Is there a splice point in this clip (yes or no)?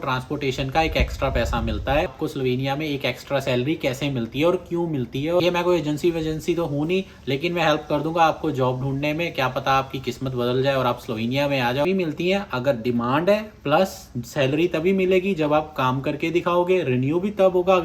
yes